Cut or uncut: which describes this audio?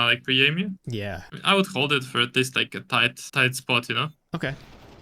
uncut